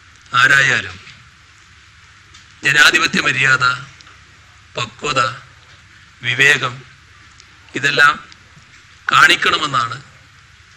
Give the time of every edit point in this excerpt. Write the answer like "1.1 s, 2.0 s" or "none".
none